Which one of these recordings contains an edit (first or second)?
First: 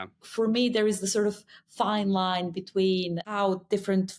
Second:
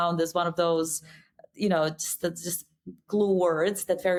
first